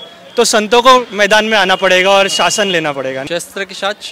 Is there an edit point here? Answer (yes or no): yes